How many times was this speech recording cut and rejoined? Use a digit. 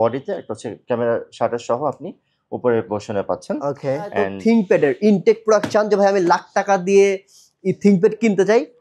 1